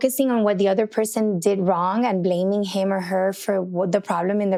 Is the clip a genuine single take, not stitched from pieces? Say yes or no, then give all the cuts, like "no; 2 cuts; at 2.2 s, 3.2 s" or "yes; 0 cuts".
yes; 0 cuts